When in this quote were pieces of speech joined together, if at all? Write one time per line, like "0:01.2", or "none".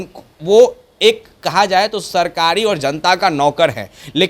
none